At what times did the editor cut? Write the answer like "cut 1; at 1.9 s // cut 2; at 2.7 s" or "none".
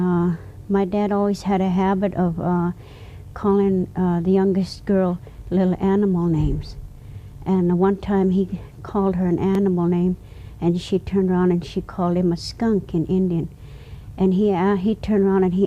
none